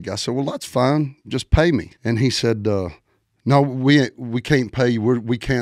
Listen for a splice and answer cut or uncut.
cut